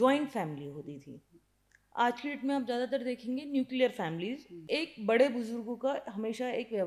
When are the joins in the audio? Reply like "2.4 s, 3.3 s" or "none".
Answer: 4.6 s